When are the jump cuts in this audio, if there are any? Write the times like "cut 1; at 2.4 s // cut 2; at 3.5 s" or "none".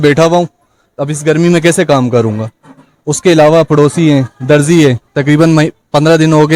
none